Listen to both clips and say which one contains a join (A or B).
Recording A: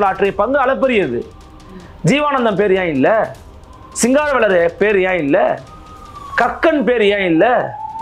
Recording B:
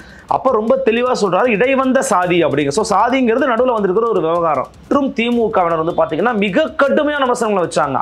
B